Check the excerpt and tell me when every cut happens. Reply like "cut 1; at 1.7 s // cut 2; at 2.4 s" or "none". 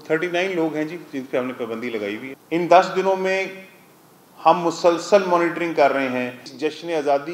cut 1; at 2.3 s // cut 2; at 6.5 s